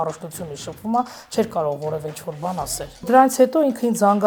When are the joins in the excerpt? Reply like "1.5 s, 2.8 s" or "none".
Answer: 3.1 s